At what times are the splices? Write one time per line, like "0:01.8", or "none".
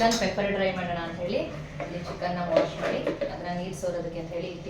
none